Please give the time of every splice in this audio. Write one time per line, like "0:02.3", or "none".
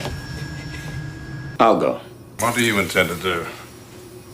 0:01.5